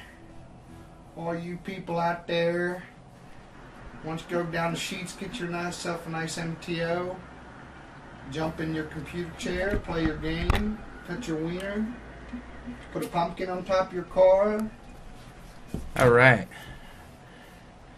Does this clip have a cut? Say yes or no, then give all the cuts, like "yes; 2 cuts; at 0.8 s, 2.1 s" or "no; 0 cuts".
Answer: yes; 1 cut; at 14.2 s